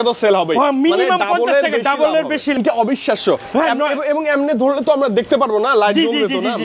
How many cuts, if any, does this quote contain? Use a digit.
1